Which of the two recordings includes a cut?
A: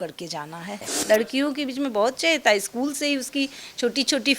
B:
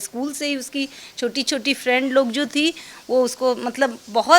A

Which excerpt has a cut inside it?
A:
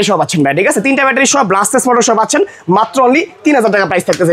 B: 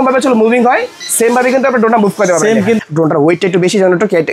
B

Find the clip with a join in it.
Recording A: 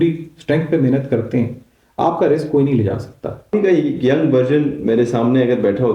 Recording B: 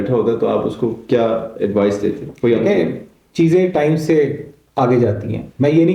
A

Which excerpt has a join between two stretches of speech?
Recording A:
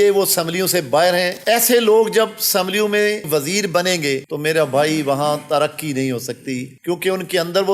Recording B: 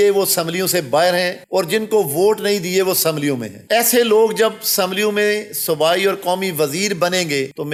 A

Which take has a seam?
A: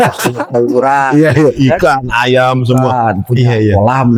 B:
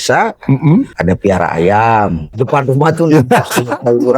B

